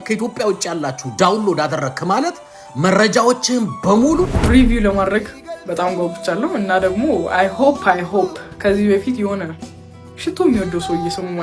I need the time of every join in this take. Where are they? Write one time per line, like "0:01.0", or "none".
0:04.4